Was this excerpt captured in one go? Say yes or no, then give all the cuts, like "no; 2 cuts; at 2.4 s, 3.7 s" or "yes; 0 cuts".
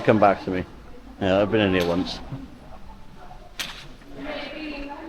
yes; 0 cuts